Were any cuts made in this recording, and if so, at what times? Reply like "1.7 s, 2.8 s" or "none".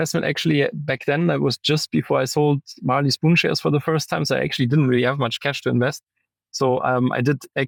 none